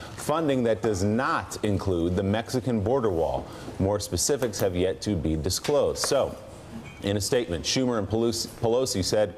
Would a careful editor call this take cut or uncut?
cut